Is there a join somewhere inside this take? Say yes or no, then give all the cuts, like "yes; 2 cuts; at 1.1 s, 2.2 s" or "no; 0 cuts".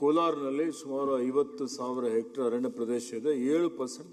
no; 0 cuts